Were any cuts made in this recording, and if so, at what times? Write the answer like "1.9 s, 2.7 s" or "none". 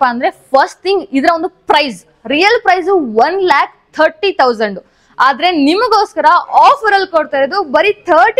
none

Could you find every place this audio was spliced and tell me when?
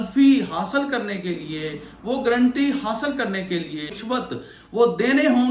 3.9 s

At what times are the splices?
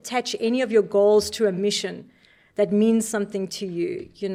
none

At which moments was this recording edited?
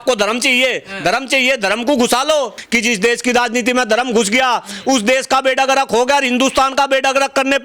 2.6 s

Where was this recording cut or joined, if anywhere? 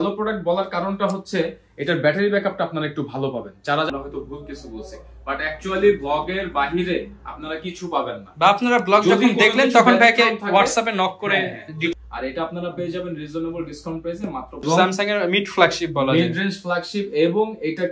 3.9 s, 11.9 s, 14.6 s

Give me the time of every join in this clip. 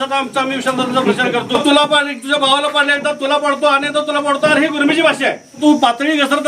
1.5 s, 5.6 s

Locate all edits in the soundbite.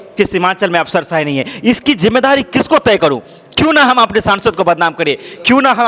none

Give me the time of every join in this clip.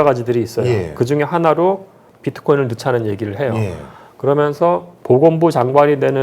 4.9 s

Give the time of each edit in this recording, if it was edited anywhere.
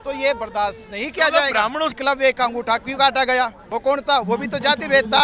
2.0 s, 3.6 s

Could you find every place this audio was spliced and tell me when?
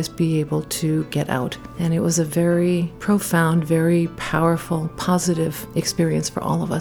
1.6 s, 2.9 s, 5.6 s

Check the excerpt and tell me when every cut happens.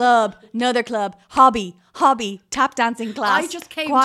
none

